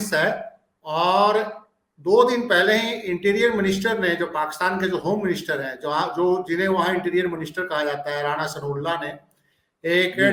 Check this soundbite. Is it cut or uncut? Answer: uncut